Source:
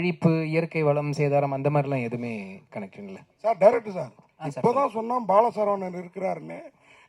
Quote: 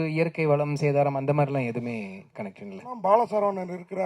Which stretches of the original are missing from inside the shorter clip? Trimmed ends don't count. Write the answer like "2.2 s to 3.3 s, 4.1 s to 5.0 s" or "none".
3.3 s to 5.2 s